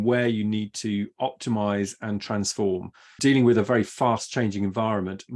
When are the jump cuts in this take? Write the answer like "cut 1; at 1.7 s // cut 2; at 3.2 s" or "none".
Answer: cut 1; at 3.0 s